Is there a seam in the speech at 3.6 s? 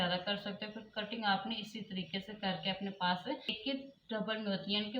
yes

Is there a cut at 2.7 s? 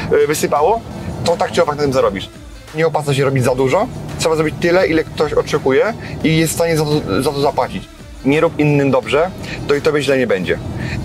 yes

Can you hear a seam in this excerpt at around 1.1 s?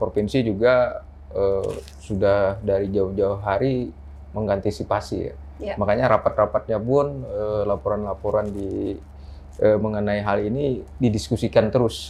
no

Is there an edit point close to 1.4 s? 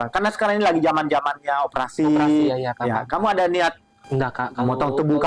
no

